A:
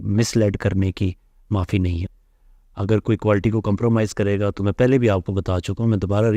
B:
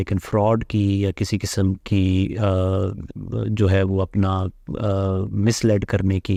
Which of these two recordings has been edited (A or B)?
A